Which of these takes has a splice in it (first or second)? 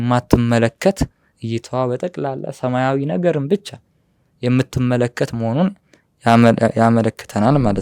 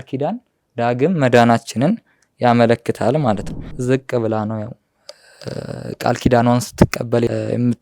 second